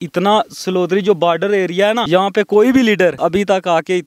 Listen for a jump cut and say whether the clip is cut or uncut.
cut